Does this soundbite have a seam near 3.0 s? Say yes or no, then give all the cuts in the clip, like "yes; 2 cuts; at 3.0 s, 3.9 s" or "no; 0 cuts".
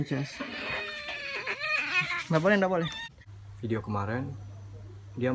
yes; 1 cut; at 3.0 s